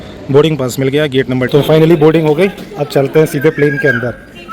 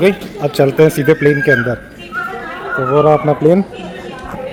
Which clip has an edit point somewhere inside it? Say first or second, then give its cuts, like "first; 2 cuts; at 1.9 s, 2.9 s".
first; 1 cut; at 1.4 s